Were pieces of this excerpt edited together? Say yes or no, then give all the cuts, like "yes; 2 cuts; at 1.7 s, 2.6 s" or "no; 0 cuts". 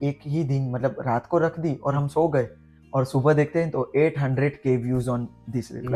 no; 0 cuts